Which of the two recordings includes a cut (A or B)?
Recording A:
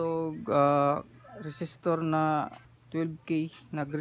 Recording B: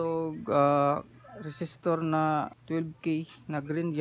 B